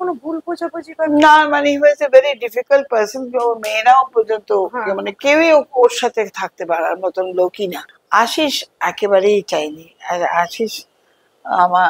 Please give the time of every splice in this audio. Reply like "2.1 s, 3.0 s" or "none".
7.7 s